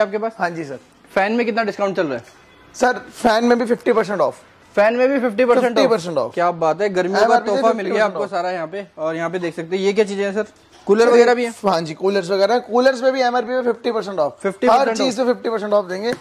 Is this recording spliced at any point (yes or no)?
no